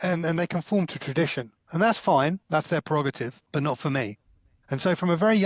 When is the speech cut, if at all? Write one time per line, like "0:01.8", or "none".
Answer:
0:03.4